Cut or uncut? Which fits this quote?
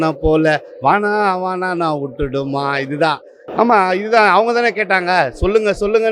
cut